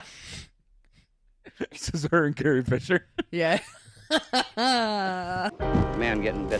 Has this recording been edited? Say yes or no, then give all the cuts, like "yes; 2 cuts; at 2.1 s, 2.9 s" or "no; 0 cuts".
yes; 1 cut; at 5.5 s